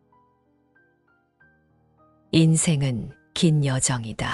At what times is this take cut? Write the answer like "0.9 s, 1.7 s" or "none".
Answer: 2.3 s